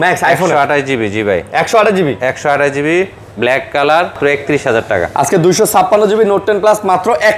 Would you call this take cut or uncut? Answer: cut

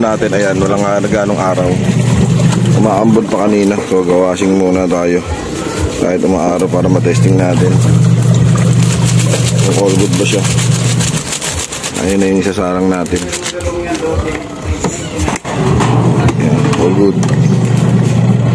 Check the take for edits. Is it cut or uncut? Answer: uncut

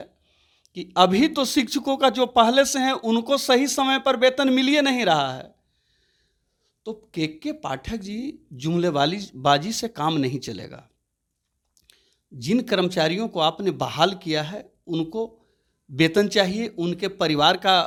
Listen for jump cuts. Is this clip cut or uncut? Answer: uncut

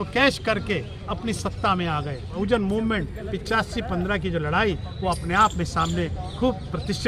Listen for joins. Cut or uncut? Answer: cut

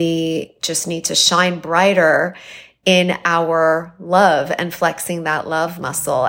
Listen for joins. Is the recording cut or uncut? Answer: uncut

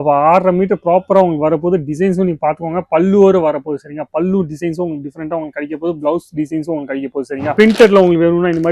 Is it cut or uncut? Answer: cut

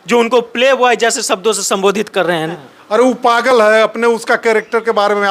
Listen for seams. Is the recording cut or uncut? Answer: cut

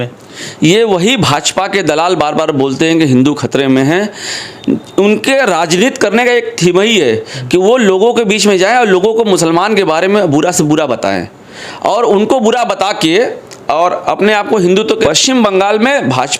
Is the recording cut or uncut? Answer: cut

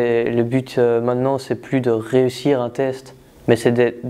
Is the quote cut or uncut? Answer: uncut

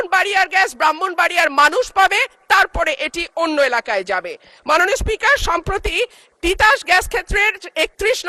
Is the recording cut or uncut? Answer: uncut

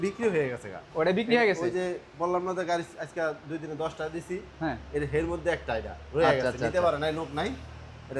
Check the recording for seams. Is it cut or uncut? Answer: uncut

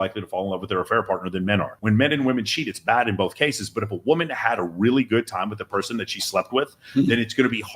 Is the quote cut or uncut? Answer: cut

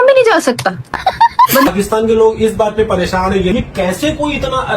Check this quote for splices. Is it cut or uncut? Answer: cut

